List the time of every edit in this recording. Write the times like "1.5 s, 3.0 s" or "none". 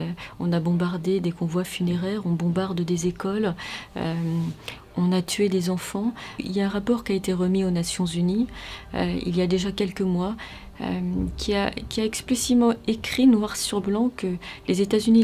none

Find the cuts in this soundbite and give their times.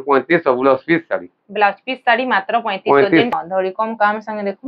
3.3 s

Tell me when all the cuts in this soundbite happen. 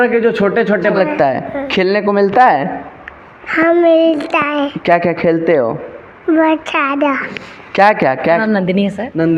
0.9 s, 8.4 s

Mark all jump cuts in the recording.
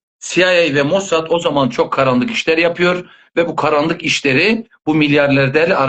none

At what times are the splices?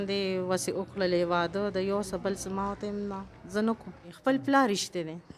4.1 s

